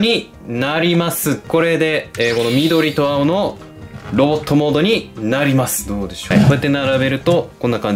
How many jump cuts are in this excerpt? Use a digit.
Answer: 2